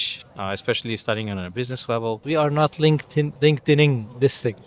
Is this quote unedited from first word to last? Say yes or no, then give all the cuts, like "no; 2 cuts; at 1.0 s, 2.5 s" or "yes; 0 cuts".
no; 2 cuts; at 2.2 s, 3.3 s